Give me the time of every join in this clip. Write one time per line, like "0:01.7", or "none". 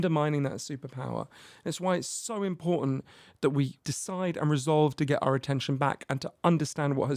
0:03.8

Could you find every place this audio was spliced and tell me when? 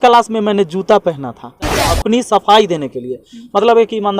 0:01.9

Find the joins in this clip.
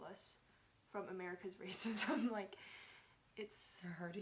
none

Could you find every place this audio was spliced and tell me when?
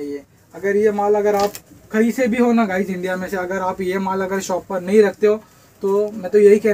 none

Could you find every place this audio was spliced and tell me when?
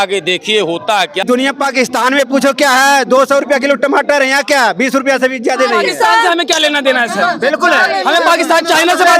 0:01.2

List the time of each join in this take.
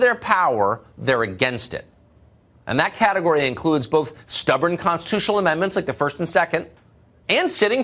none

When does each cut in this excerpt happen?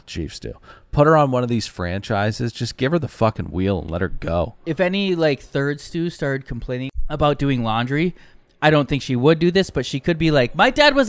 0:07.0

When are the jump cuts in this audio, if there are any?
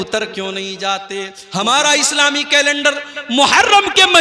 0:01.4

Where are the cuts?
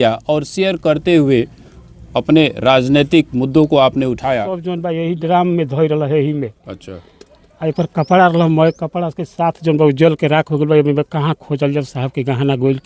0:04.7

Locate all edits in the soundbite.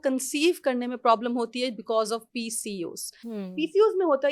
none

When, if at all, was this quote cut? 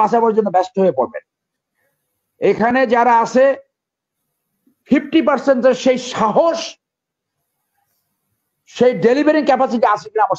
none

